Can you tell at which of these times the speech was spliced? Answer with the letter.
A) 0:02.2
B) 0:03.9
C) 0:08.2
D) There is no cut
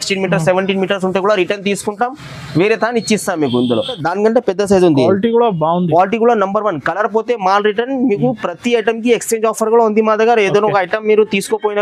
B